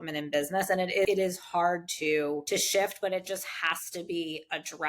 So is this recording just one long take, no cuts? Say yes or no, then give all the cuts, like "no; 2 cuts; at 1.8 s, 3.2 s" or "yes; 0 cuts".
no; 2 cuts; at 1.1 s, 2.4 s